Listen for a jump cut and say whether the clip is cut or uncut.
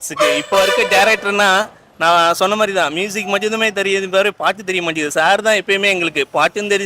uncut